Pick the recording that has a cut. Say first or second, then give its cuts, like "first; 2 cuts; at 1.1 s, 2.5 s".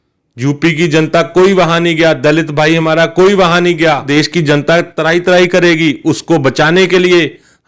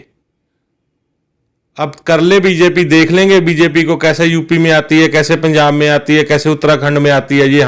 first; 1 cut; at 4.1 s